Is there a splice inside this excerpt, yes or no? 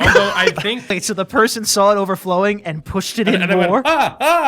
yes